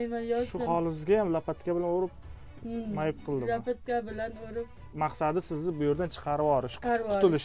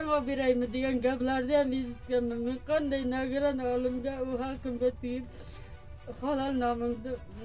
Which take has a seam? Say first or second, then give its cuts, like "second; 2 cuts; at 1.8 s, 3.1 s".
first; 1 cut; at 5.0 s